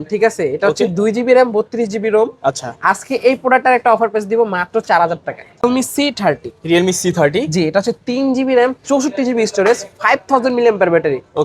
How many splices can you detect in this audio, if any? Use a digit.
1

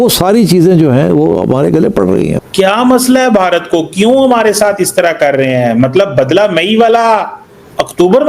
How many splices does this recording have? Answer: 1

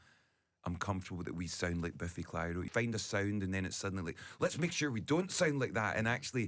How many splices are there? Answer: 1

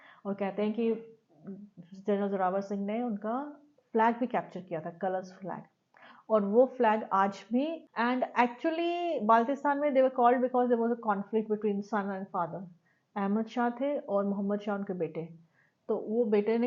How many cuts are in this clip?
1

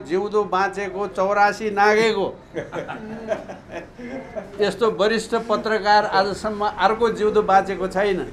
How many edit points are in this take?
0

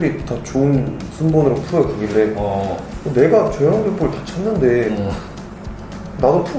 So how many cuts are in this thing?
0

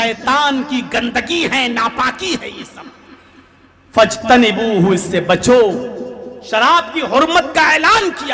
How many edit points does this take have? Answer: 0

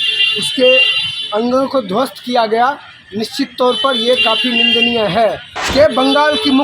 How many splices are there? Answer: 1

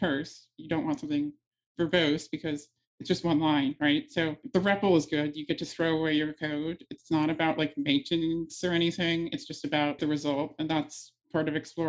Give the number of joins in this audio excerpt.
2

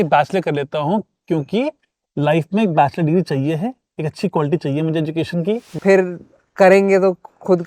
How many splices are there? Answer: 1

